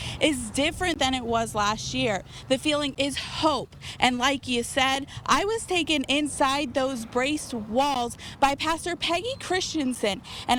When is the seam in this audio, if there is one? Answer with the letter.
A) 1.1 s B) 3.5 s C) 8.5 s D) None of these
D